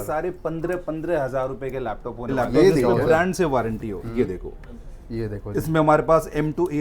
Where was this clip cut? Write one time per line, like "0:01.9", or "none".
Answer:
0:02.3

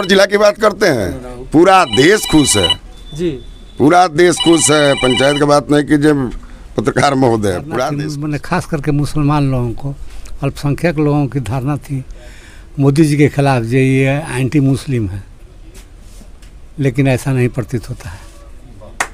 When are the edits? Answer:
0:08.1

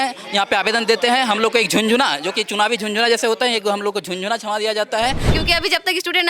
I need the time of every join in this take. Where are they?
0:05.3

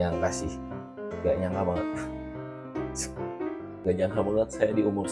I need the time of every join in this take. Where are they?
0:03.7

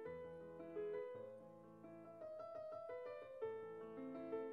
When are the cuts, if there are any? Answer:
none

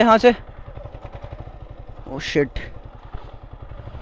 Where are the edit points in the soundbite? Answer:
none

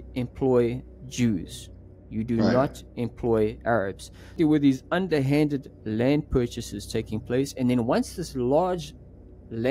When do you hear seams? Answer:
0:04.4

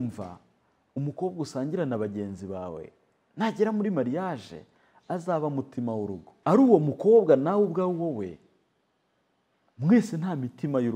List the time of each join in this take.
0:06.3

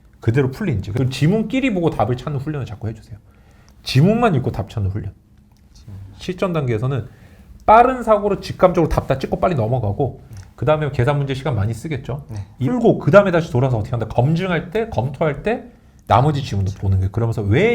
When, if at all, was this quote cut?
0:00.9
0:06.1
0:12.7

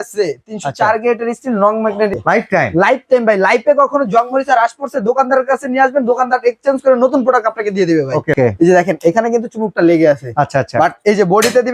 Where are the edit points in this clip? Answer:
0:02.2
0:08.4

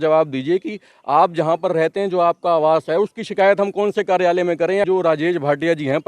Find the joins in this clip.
0:04.9

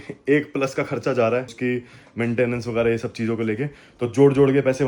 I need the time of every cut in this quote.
0:01.5

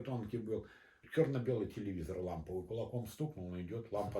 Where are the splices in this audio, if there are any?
0:01.0

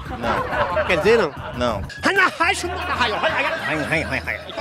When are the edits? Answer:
0:01.9

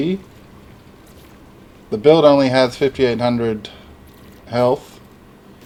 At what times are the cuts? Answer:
none

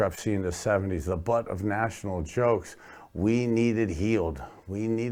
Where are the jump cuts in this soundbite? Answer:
none

